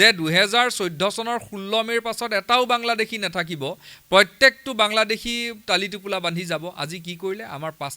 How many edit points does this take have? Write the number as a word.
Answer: zero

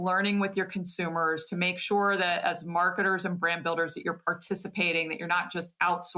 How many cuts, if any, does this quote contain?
zero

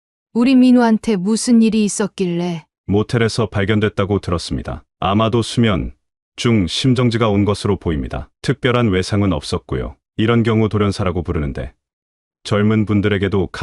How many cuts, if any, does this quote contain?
one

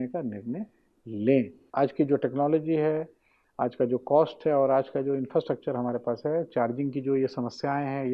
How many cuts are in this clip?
one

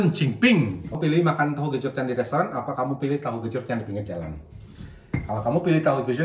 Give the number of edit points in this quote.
one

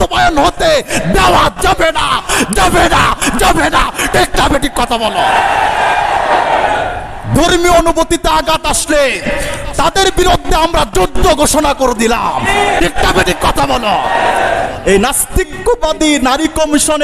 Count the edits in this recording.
one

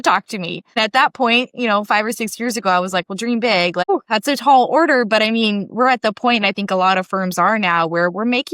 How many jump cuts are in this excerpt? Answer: two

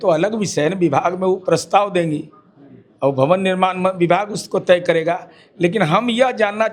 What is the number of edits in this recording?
zero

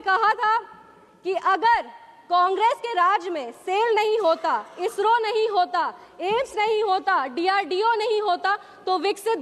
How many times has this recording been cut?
zero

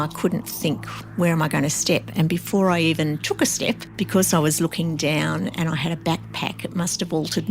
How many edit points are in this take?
one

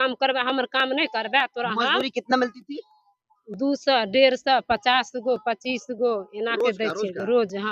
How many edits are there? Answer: zero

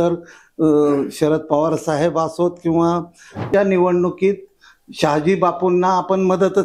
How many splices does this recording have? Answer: one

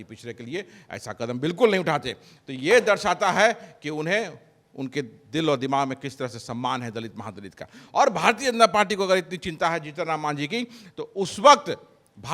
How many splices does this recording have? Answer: zero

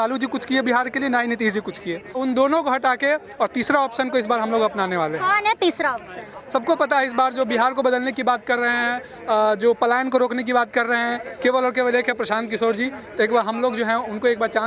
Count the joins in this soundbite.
zero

